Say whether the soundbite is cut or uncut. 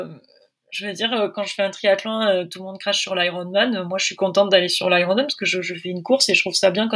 uncut